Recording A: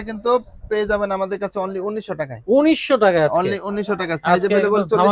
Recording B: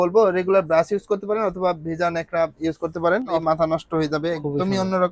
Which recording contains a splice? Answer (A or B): B